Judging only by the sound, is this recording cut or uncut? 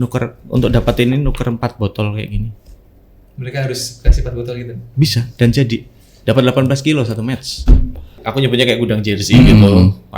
cut